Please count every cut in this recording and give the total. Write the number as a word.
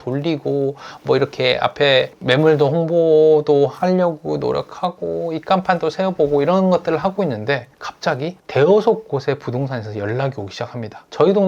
zero